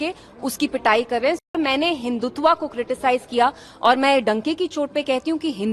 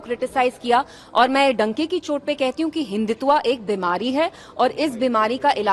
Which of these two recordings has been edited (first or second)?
first